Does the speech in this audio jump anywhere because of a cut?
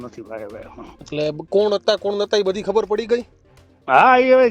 no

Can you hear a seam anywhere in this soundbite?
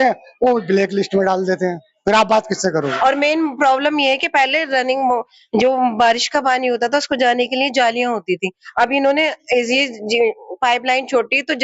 yes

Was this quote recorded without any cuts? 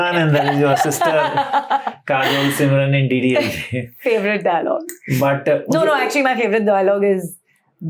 yes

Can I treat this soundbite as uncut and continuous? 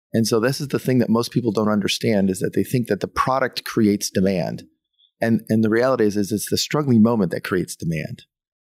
yes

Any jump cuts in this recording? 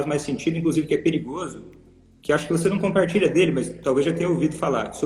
no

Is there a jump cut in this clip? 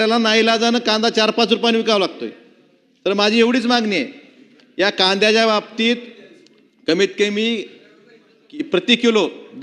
no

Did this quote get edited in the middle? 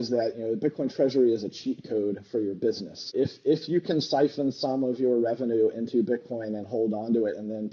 no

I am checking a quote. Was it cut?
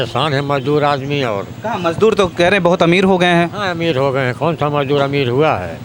no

